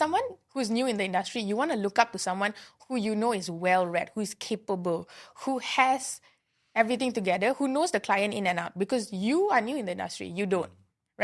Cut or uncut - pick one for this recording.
uncut